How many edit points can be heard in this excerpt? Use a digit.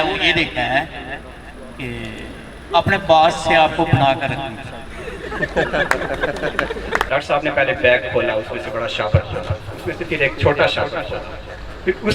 1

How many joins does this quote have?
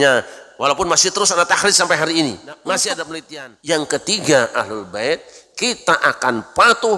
1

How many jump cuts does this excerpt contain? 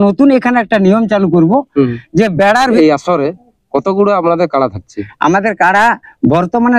1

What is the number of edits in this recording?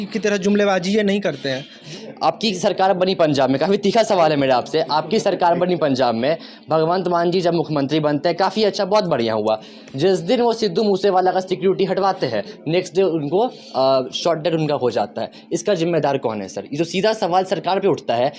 1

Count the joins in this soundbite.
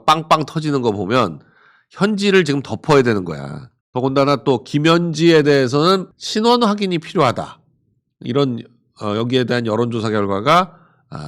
1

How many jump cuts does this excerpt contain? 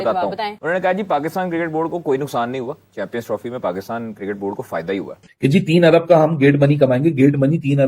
1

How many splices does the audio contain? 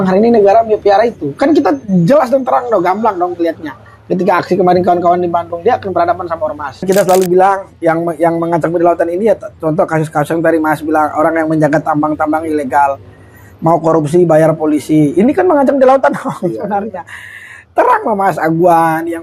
1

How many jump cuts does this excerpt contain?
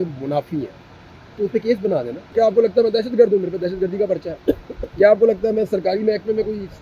1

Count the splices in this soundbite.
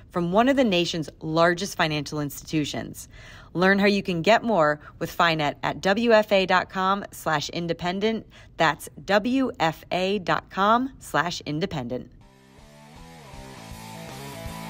1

